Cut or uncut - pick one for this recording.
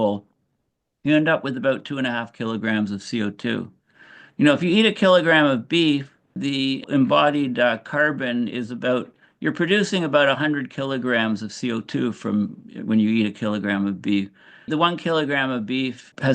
cut